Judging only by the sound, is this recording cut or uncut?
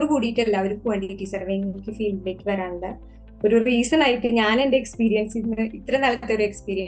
uncut